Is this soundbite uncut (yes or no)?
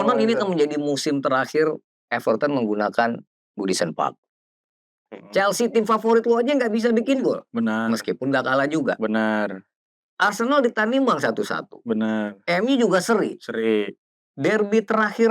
yes